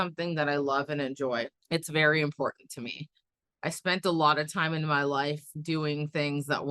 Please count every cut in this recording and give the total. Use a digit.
1